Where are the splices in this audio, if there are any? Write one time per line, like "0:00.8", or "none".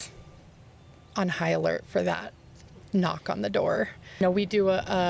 0:04.2